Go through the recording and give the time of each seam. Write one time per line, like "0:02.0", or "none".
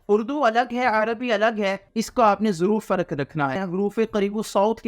0:01.8
0:03.6